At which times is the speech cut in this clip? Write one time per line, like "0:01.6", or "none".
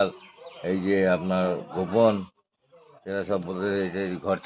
none